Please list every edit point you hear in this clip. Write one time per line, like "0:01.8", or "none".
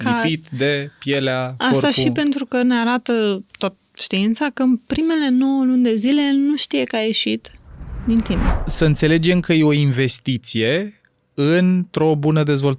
0:08.5